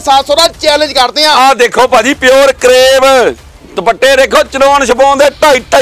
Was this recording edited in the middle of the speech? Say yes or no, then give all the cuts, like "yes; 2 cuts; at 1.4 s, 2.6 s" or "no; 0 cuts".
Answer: no; 0 cuts